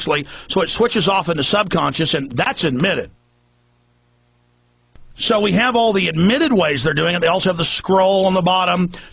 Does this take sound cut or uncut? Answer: uncut